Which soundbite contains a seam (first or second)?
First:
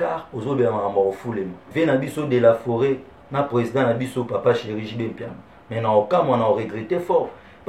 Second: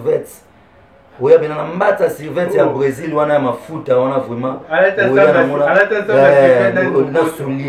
first